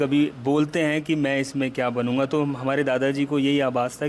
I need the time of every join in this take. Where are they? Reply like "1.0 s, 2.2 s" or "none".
none